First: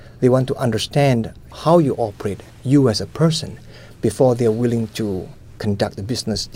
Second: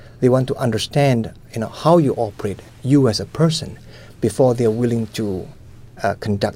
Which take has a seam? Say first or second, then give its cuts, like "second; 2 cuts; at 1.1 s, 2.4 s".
first; 2 cuts; at 1.4 s, 5.6 s